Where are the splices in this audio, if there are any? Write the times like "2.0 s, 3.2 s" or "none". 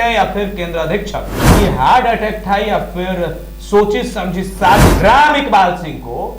1.5 s, 4.9 s